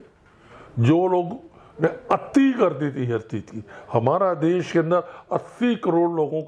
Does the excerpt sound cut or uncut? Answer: uncut